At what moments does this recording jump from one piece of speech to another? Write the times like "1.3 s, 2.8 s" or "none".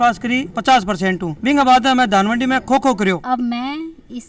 3.2 s